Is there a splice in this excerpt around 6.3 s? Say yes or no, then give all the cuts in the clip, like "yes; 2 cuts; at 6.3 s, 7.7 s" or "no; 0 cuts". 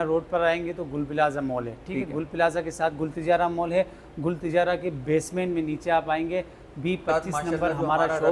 no; 0 cuts